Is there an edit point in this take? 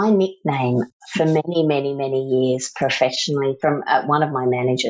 yes; 1 cut; at 0.9 s

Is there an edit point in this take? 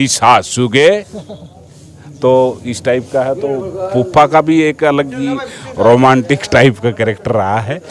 no; 0 cuts

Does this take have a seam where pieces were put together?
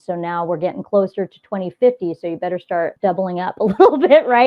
yes; 1 cut; at 2.9 s

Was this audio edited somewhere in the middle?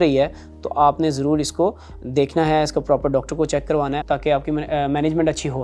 no; 0 cuts

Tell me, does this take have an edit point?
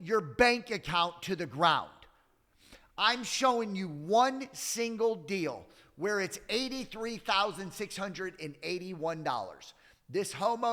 no; 0 cuts

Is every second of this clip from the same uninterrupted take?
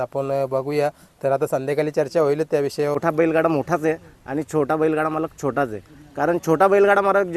no; 1 cut; at 2.9 s

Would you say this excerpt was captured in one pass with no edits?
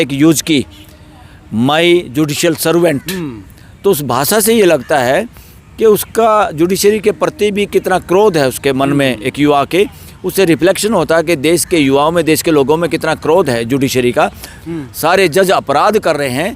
no; 1 cut; at 14.6 s

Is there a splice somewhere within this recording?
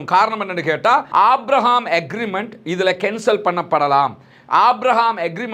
yes; 1 cut; at 1.1 s

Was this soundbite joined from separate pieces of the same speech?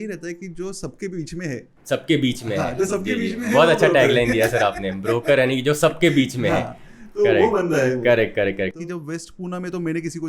yes; 1 cut; at 8.9 s

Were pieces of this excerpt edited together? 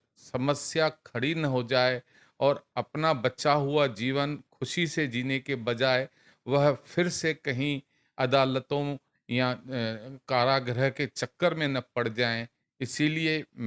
no; 0 cuts

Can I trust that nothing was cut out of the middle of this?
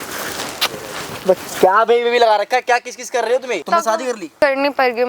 no; 1 cut; at 4.1 s

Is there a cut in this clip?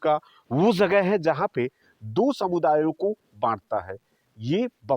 no; 0 cuts

